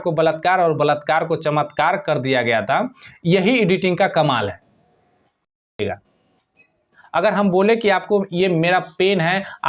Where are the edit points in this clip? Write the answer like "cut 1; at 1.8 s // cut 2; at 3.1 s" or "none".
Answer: cut 1; at 5.8 s